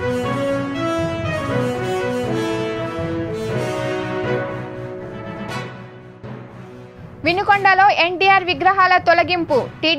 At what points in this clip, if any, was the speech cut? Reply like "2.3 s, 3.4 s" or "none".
6.6 s

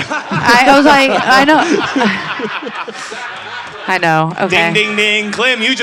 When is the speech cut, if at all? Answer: none

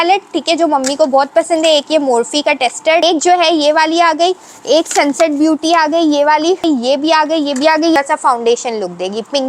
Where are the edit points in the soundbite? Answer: 3.0 s, 6.6 s, 8.0 s

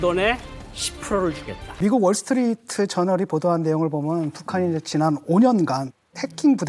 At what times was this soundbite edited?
1.8 s

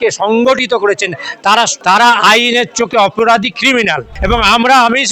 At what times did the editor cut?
1.8 s, 4.1 s

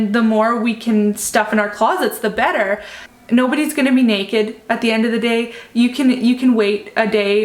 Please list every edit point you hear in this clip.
3.0 s

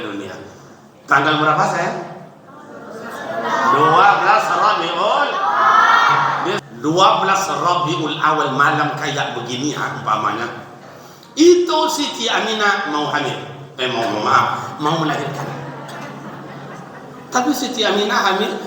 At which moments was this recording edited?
6.7 s

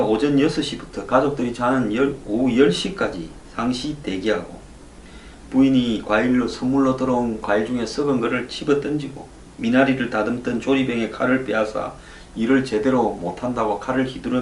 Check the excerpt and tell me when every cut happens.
1.1 s

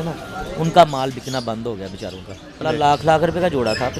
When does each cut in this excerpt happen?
2.6 s

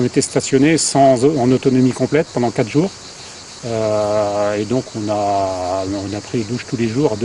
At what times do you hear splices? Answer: none

